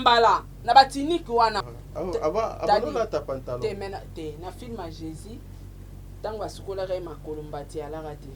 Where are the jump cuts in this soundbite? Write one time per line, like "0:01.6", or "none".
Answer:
0:01.7